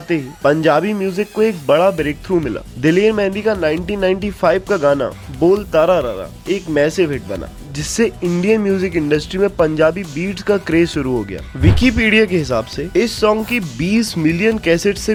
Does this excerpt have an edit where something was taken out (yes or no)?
no